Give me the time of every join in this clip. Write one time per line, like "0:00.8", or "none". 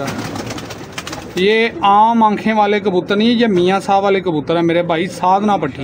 none